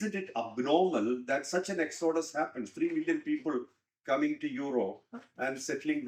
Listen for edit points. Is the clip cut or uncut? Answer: uncut